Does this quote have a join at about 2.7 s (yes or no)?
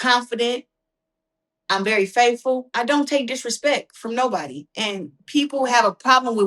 yes